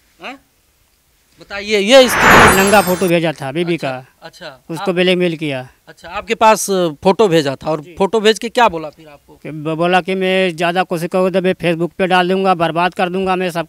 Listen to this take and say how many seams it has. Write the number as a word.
one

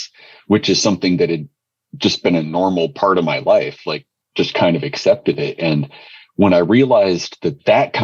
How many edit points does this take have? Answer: one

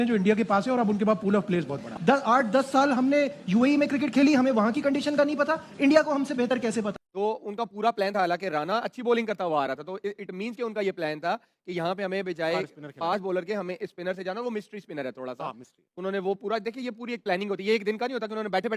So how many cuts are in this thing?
two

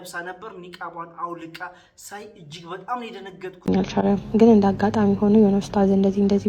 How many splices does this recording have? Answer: one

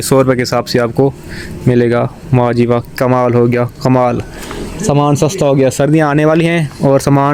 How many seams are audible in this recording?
zero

